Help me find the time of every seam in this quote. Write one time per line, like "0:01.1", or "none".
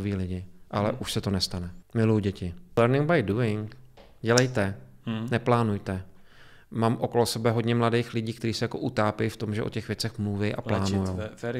0:01.8
0:02.8